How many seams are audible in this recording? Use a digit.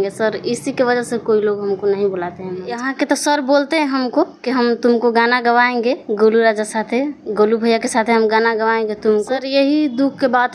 2